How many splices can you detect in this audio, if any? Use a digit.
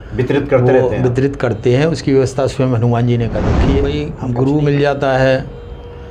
1